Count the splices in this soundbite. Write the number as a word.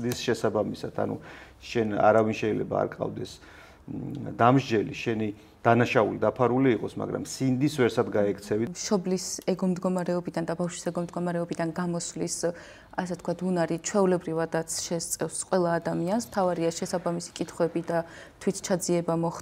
one